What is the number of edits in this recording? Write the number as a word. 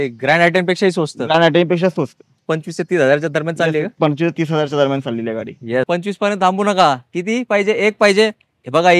two